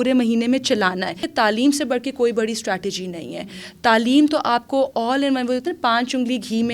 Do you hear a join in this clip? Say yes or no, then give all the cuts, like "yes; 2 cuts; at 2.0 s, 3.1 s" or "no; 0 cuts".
yes; 1 cut; at 1.2 s